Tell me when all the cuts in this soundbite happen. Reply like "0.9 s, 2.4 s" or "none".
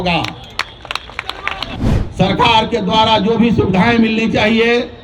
1.7 s